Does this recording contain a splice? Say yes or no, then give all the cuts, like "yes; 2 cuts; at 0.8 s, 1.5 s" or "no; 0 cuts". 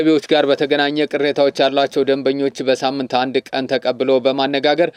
no; 0 cuts